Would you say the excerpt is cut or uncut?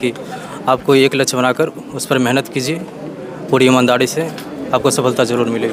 uncut